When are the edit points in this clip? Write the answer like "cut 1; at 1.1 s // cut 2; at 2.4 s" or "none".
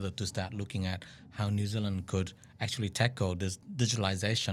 cut 1; at 3.6 s